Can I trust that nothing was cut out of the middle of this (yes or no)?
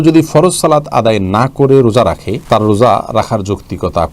no